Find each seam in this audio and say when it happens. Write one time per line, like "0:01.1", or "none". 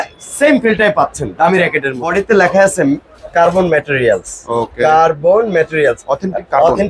0:02.0